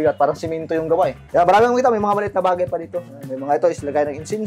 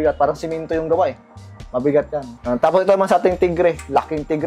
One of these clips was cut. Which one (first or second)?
first